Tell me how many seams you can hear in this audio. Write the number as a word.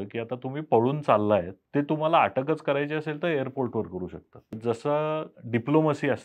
two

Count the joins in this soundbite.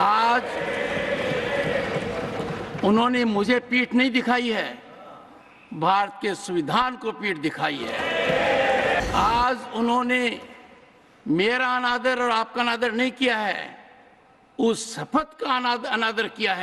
one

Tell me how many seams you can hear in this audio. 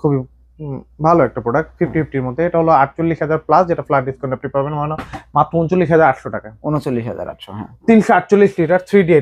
zero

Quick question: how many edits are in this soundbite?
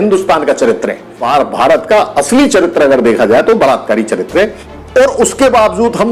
two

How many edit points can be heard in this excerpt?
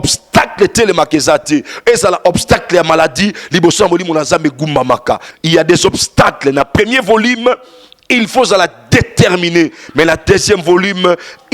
one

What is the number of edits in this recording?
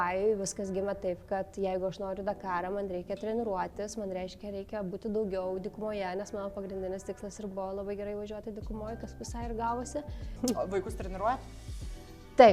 one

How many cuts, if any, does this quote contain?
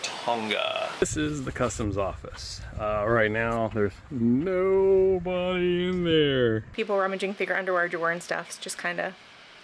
two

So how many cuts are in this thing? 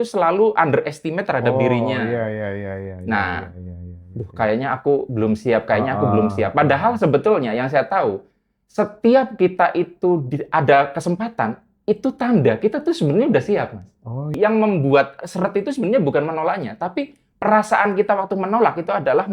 one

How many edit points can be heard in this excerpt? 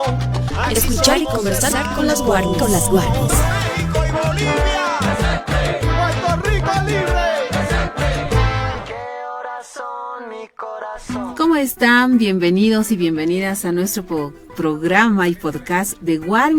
zero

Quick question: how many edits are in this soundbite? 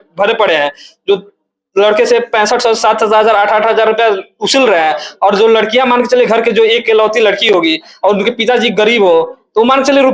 zero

